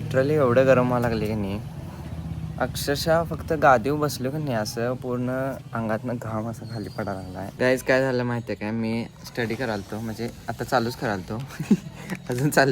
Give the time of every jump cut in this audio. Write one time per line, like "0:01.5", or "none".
0:07.4